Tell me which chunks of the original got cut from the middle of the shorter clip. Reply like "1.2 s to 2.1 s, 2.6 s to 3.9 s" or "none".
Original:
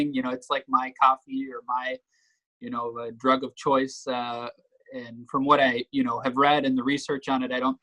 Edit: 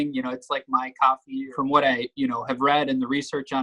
1.5 s to 5.2 s